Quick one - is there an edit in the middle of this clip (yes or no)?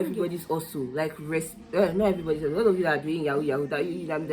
no